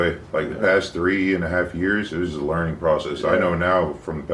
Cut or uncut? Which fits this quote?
uncut